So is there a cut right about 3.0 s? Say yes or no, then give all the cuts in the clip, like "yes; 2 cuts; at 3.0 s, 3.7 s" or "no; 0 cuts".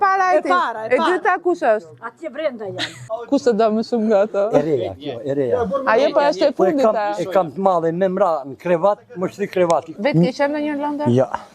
yes; 2 cuts; at 3.0 s, 9.9 s